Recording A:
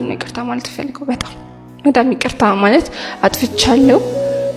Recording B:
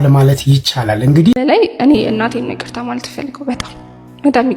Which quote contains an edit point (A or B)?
B